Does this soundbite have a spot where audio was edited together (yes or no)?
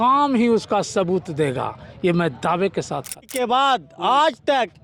yes